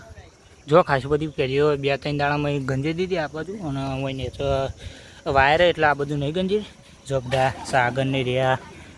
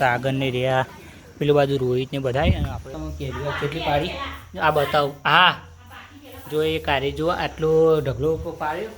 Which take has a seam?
second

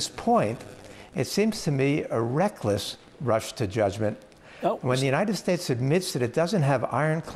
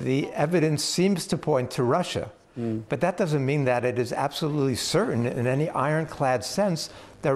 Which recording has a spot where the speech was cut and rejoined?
first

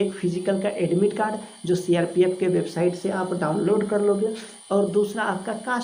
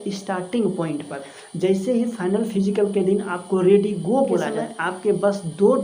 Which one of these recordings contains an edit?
second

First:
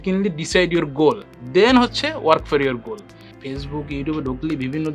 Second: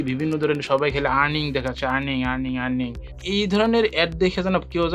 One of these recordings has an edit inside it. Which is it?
first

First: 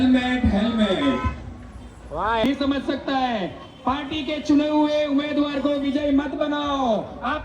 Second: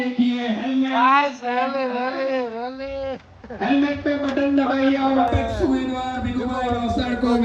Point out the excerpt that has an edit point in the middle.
first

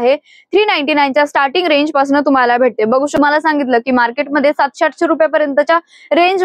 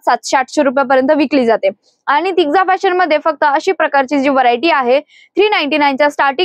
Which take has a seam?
first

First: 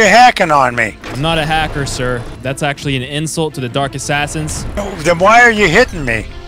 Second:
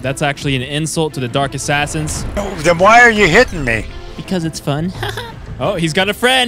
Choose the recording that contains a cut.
first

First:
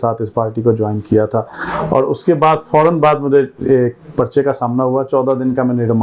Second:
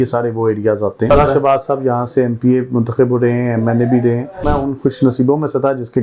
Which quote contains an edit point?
second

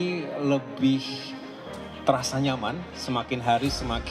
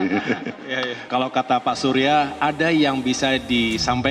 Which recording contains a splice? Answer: second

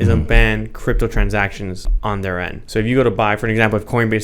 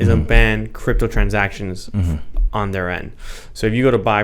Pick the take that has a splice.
first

